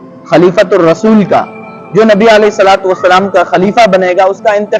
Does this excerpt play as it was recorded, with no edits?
yes; 0 cuts

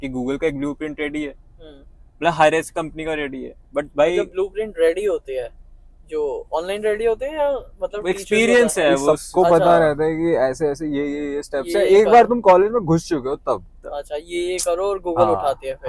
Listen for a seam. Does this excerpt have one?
no; 0 cuts

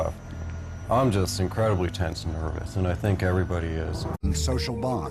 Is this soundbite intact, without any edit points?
yes; 0 cuts

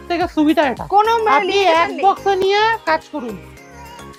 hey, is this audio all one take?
yes; 0 cuts

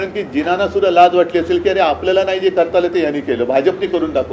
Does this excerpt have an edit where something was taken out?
no; 0 cuts

